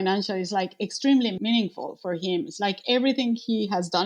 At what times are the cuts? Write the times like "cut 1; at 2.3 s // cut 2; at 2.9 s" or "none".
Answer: cut 1; at 1.4 s